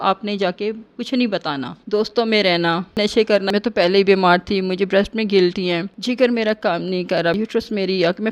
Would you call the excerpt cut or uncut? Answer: cut